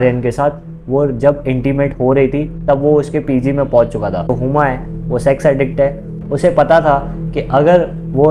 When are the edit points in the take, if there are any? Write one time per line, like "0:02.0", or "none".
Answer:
0:04.3
0:06.1